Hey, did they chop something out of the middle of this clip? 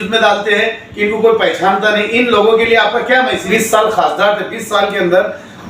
yes; 1 cut; at 3.5 s

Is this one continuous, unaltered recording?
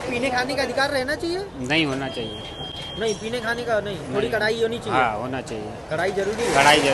yes; 0 cuts

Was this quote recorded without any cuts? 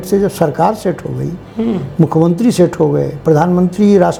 yes; 0 cuts

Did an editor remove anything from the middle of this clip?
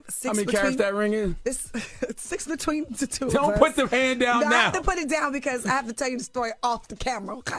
no; 0 cuts

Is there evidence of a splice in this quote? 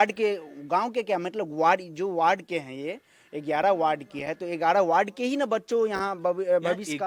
no; 0 cuts

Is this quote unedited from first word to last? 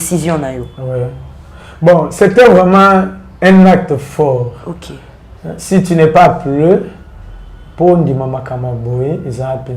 no; 1 cut; at 2.0 s

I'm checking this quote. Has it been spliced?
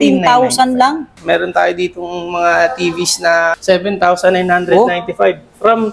yes; 2 cuts; at 1.1 s, 3.5 s

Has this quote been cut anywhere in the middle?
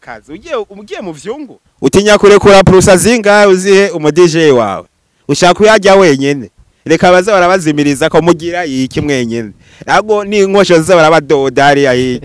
yes; 1 cut; at 1.6 s

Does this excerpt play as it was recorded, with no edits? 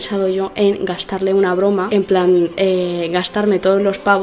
no; 1 cut; at 1.9 s

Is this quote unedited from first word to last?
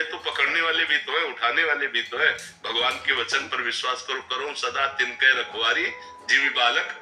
yes; 0 cuts

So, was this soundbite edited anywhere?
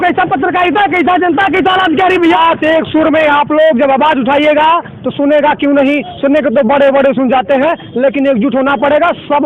yes; 1 cut; at 2.2 s

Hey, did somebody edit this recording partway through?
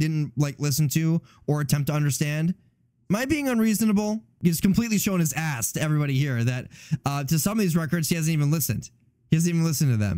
yes; 1 cut; at 4.3 s

